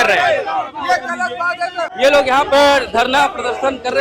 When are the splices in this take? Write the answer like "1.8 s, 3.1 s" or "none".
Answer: 1.9 s